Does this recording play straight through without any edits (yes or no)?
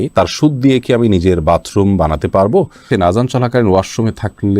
no